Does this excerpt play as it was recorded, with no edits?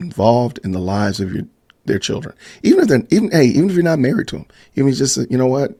yes; 0 cuts

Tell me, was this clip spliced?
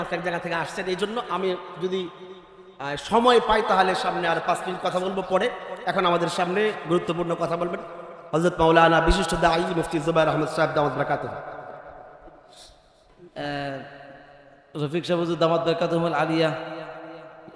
yes; 1 cut; at 13.2 s

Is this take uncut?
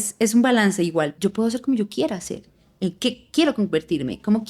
no; 1 cut; at 1.1 s

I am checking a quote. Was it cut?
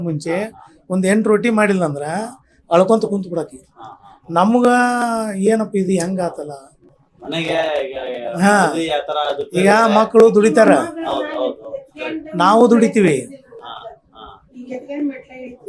no; 0 cuts

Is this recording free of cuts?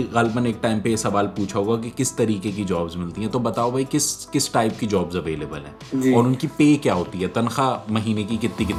yes; 0 cuts

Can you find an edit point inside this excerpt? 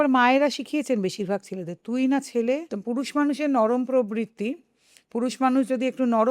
yes; 1 cut; at 2.7 s

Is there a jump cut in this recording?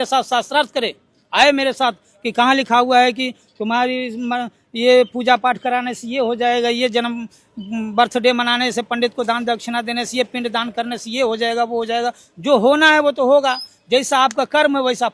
no; 0 cuts

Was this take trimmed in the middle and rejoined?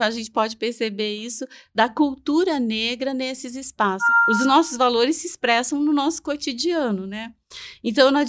yes; 1 cut; at 4.0 s

